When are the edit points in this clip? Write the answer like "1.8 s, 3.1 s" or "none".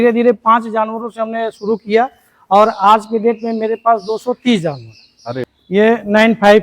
5.5 s